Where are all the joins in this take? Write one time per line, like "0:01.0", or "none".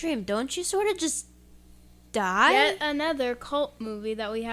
0:02.5